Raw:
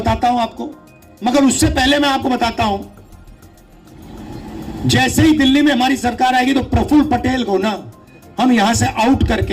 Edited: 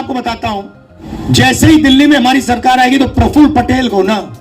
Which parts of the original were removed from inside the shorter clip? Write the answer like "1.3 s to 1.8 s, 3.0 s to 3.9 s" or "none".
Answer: 3.1 s to 4.5 s